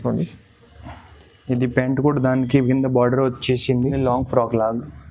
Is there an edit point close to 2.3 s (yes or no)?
no